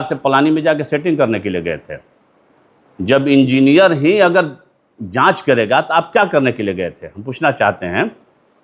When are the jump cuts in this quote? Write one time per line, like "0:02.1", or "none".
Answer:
none